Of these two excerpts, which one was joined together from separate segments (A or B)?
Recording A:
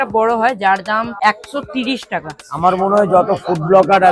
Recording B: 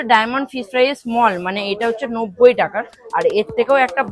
A